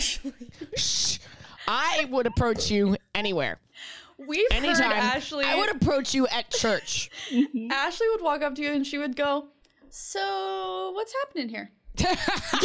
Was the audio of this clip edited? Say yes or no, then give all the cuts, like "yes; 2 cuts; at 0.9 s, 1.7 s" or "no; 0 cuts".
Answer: no; 0 cuts